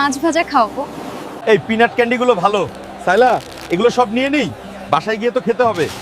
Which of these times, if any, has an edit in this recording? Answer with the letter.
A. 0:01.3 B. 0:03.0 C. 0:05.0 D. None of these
D